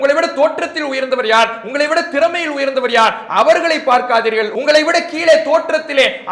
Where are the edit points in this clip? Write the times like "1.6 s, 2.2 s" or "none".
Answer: 4.5 s